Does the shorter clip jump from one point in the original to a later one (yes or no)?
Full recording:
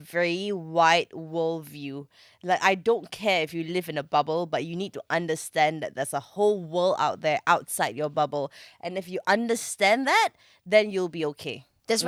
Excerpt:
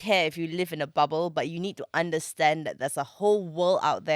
no